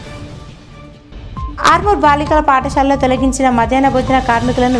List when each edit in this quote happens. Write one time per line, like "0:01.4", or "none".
0:01.0